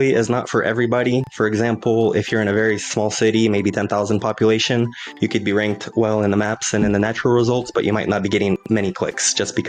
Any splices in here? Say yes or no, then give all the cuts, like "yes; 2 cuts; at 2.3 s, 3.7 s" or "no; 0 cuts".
no; 0 cuts